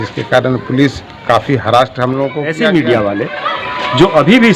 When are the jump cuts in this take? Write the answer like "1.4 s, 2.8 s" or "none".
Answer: 2.5 s